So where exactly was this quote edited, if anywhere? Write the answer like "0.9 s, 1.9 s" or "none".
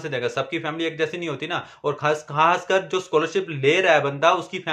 none